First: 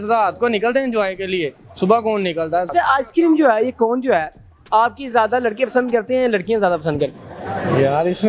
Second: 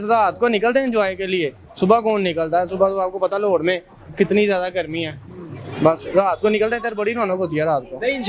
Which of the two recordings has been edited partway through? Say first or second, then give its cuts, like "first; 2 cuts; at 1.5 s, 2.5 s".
first; 1 cut; at 2.7 s